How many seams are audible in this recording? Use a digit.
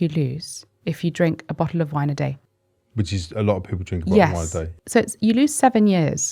2